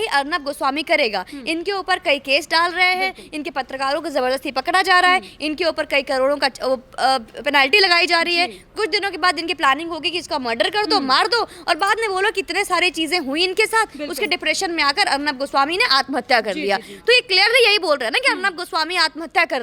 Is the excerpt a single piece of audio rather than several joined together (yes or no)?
yes